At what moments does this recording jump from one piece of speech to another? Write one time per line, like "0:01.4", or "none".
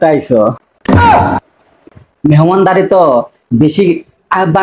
0:02.0